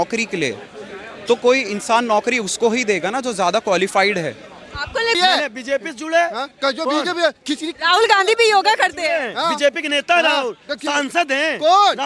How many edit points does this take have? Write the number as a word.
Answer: one